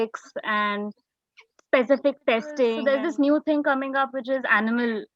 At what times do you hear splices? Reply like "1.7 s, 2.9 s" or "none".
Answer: 2.8 s